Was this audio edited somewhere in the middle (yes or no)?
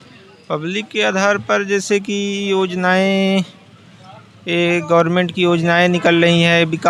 no